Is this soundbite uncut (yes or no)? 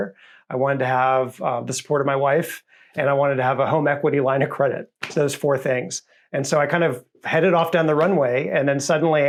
yes